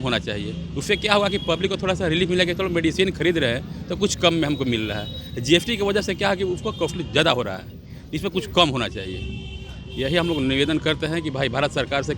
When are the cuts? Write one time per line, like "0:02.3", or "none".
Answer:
none

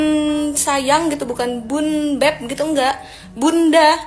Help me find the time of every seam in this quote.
none

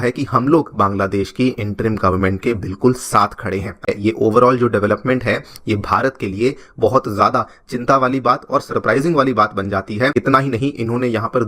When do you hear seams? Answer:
0:03.9
0:10.1

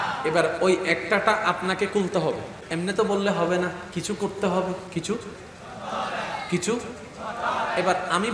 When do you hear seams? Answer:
0:02.6
0:03.8
0:04.9

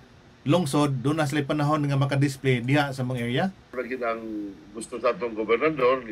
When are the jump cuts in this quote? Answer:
0:03.7

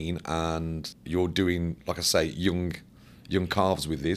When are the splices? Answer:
0:00.9

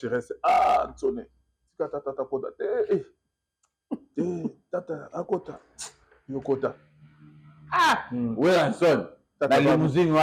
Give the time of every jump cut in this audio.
none

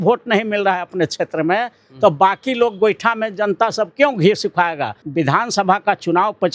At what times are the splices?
0:05.0

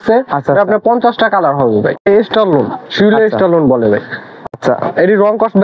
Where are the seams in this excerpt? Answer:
0:02.1

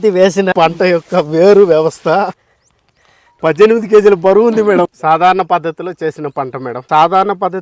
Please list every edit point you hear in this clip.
0:04.5
0:06.8

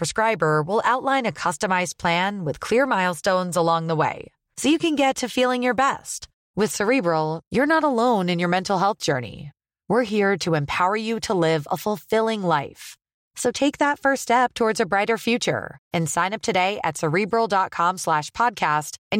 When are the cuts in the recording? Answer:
none

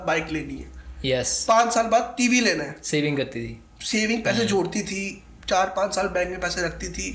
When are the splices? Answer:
none

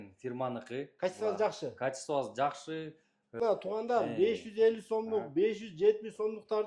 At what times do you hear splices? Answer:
0:03.4

